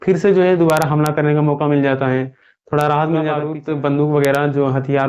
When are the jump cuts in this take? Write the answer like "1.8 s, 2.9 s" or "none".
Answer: 3.5 s